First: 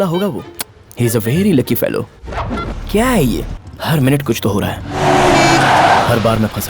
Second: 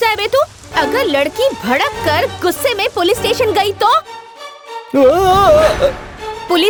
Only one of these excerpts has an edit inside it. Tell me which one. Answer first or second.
first